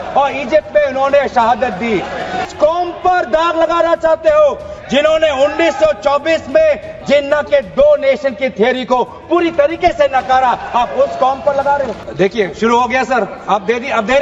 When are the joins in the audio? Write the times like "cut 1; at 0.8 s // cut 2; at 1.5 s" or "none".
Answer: cut 1; at 2.5 s // cut 2; at 12.0 s